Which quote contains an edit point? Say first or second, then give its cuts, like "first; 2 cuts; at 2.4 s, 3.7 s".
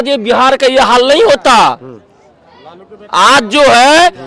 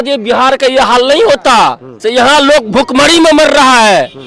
second; 1 cut; at 1.9 s